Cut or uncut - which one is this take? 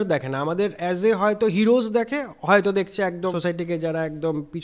cut